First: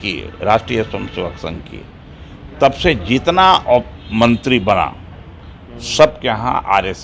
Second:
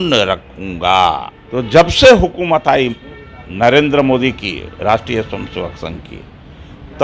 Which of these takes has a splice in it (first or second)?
second